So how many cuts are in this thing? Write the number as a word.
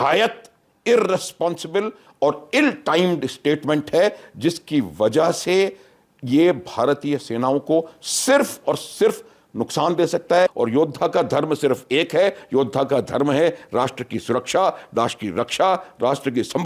one